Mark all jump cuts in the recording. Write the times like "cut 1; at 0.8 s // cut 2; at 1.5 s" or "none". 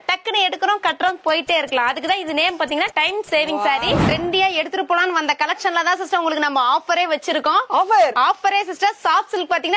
cut 1; at 4.0 s